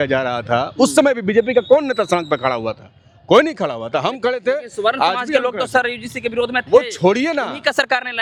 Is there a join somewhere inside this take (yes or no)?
no